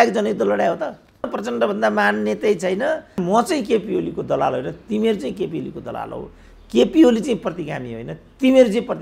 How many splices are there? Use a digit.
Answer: 2